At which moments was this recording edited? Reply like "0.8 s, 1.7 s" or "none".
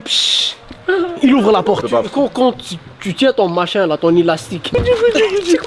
1.8 s, 4.7 s